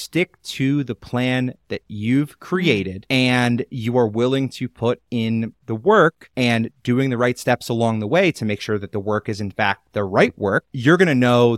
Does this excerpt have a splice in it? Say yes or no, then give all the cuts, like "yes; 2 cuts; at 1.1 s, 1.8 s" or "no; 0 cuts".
no; 0 cuts